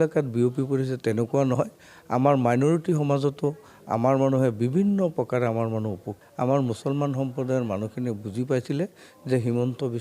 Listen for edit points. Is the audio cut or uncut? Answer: cut